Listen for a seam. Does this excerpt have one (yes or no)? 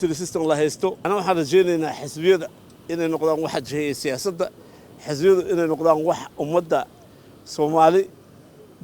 yes